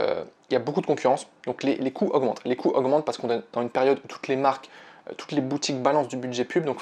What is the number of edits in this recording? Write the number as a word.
zero